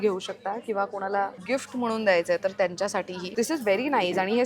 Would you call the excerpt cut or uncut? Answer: cut